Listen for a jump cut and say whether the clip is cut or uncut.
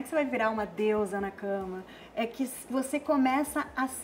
cut